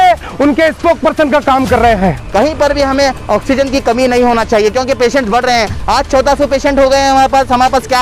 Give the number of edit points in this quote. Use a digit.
1